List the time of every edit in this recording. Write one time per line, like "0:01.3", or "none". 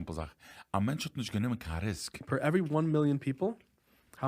0:02.2